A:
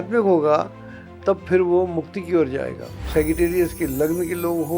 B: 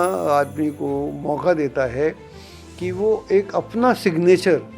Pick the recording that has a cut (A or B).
A